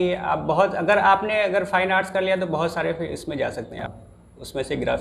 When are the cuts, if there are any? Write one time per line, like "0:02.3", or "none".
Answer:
0:03.9